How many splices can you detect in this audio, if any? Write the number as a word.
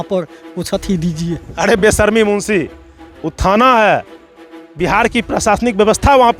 one